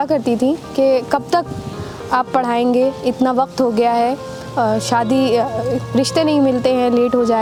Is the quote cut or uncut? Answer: uncut